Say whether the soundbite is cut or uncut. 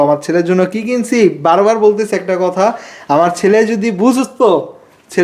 uncut